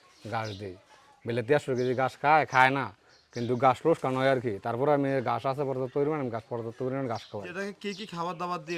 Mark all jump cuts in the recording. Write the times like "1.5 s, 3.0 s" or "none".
7.5 s